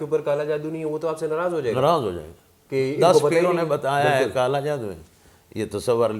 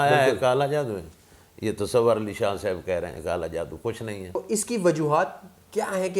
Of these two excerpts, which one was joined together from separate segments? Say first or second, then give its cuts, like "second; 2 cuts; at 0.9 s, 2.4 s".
second; 1 cut; at 4.4 s